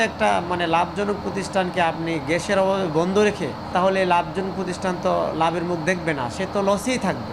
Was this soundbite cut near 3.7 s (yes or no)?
yes